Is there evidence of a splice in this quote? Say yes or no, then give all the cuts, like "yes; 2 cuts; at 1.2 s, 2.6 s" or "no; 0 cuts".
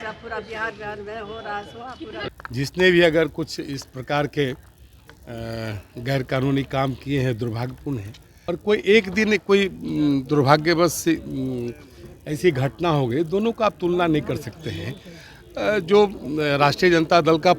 yes; 2 cuts; at 2.1 s, 8.2 s